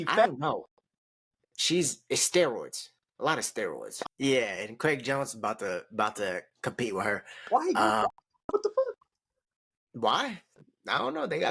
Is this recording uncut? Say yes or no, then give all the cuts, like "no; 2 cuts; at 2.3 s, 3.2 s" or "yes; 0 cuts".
no; 1 cut; at 3.9 s